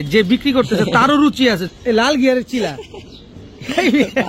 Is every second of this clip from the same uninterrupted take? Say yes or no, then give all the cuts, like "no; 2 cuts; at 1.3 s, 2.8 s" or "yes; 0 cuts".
no; 1 cut; at 1.7 s